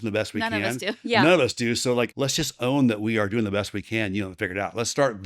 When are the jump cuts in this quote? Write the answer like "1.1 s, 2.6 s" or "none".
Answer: 2.1 s